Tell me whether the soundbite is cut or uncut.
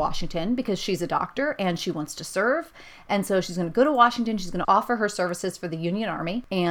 uncut